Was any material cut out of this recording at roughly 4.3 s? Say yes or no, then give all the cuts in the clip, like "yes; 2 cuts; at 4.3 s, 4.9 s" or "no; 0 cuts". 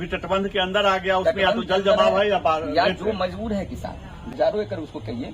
yes; 1 cut; at 4.3 s